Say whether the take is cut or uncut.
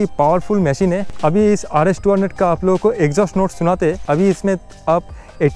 cut